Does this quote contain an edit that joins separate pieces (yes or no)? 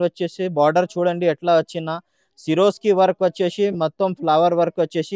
no